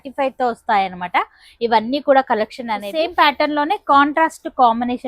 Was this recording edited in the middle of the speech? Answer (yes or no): yes